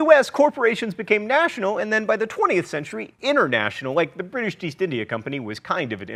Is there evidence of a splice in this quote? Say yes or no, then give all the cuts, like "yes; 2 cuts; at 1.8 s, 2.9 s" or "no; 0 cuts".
no; 0 cuts